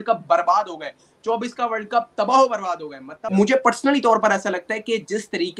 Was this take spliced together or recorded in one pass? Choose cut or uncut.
cut